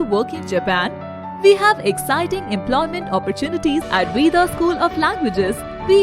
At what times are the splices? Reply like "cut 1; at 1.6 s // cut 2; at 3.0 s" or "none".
cut 1; at 3.9 s